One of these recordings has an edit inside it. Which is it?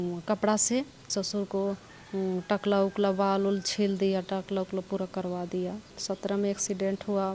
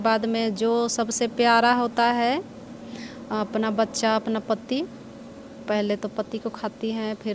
first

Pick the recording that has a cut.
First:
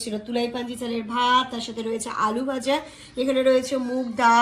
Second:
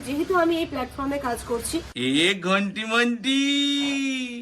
second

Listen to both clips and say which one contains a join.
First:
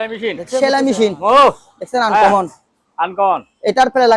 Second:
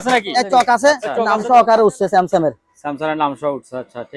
second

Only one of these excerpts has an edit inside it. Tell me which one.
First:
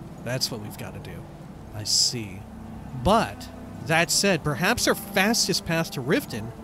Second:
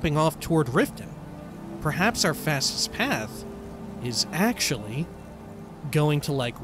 second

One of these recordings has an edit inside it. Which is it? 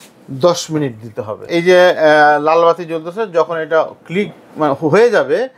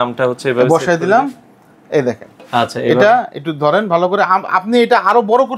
first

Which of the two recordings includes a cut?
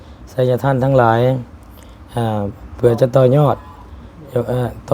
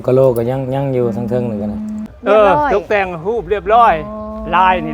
second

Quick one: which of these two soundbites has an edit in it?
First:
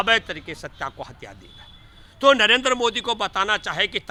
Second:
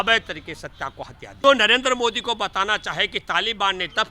second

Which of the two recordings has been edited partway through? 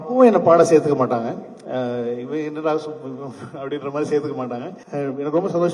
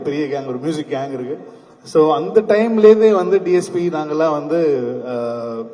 first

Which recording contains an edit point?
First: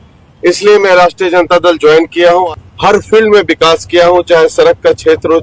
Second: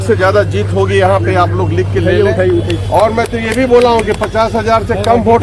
first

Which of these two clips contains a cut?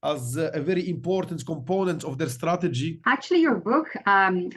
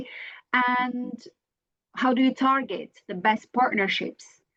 first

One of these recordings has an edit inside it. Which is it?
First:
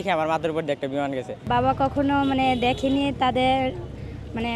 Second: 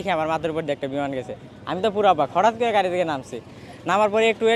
first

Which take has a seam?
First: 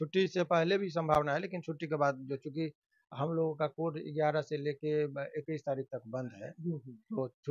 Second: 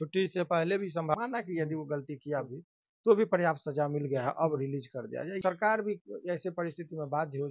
second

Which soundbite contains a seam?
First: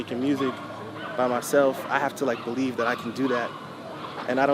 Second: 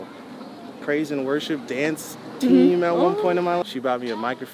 second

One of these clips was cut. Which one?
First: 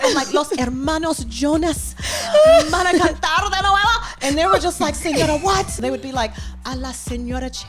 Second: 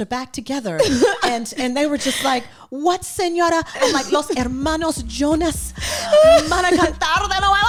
first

